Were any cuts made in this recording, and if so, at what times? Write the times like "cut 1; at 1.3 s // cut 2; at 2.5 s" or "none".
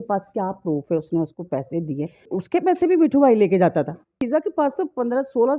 cut 1; at 2.3 s // cut 2; at 4.2 s